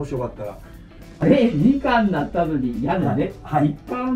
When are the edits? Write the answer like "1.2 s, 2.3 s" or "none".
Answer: 1.2 s